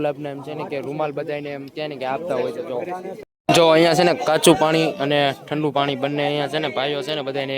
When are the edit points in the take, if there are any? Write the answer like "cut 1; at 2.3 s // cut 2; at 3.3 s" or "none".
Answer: cut 1; at 3.2 s